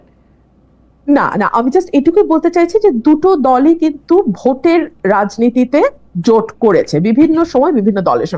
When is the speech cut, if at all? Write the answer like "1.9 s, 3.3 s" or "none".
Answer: none